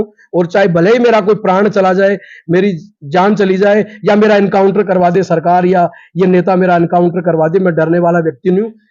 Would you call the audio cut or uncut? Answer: uncut